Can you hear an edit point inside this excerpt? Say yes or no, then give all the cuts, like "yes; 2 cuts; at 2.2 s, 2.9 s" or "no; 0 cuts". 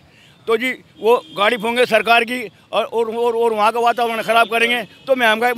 no; 0 cuts